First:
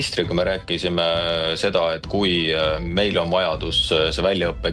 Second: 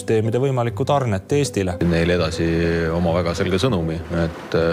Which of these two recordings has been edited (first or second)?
second